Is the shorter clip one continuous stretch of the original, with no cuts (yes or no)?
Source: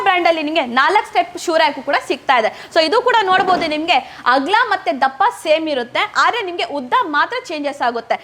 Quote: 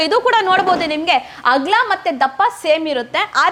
yes